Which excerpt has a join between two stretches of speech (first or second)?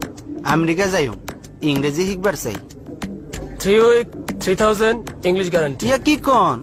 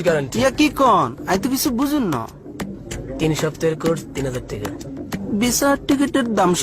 second